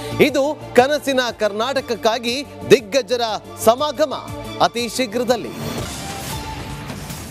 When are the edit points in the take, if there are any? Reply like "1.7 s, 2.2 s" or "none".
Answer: 6.3 s